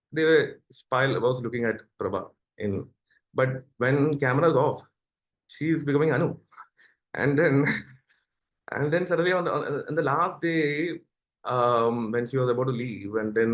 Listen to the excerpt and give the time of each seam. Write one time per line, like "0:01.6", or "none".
none

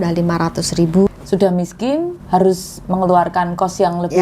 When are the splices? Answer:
0:01.1
0:02.2

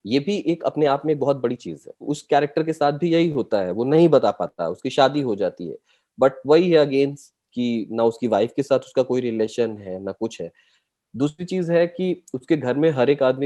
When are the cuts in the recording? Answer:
0:02.1

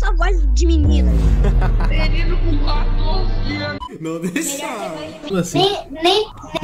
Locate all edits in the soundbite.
0:03.8
0:05.3

